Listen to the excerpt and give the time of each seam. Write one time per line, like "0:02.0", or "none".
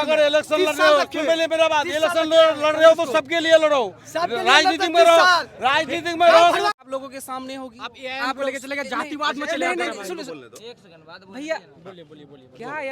0:06.8